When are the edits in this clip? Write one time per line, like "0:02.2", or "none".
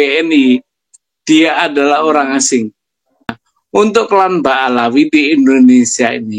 0:03.4

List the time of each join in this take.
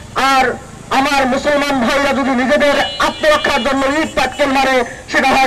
none

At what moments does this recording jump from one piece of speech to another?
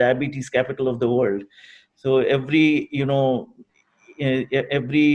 none

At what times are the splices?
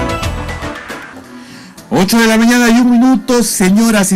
0:01.0

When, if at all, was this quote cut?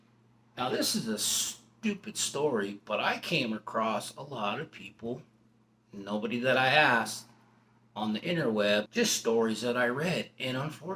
0:08.9

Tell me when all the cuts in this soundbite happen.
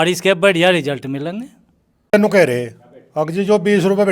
0:02.1

